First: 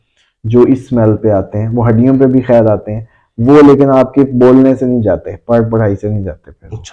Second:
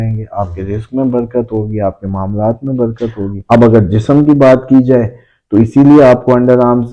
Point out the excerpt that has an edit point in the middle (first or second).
second